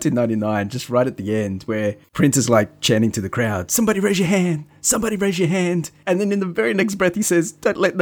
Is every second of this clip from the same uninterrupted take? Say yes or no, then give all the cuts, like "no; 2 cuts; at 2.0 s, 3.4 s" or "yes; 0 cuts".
no; 2 cuts; at 2.0 s, 5.9 s